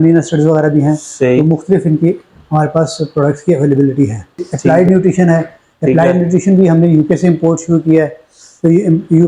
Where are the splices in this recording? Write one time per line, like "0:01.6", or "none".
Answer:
0:04.5